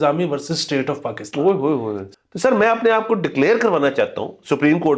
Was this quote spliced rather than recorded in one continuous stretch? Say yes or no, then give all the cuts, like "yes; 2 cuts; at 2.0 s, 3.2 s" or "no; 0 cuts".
yes; 1 cut; at 2.0 s